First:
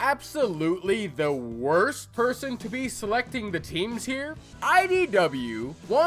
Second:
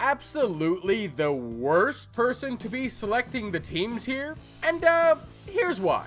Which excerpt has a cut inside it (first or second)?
first